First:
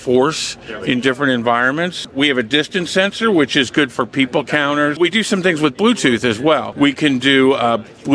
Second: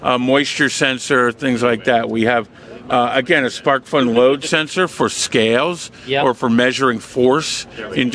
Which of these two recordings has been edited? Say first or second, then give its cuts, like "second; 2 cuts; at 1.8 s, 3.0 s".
first; 3 cuts; at 2.1 s, 5.0 s, 6.7 s